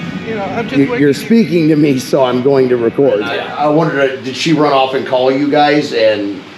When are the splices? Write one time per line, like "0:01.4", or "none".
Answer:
0:03.4